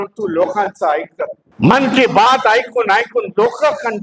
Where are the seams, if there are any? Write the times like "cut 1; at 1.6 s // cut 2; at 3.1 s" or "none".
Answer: cut 1; at 1.4 s